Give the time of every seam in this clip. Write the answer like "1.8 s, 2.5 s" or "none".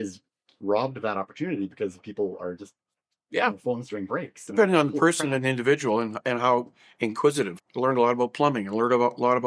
7.6 s